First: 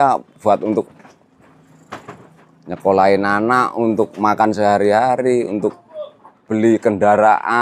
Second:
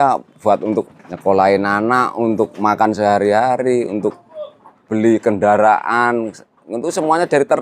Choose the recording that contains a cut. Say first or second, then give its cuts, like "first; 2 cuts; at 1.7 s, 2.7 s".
second; 1 cut; at 1.0 s